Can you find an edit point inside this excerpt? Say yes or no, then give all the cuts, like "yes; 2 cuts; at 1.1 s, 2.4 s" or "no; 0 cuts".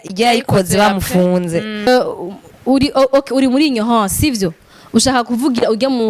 yes; 1 cut; at 1.9 s